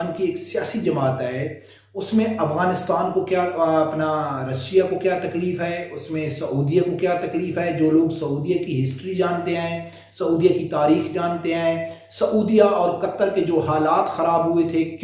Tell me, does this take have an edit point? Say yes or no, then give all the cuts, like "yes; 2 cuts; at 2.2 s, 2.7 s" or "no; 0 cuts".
no; 0 cuts